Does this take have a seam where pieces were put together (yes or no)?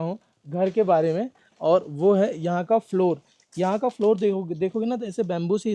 no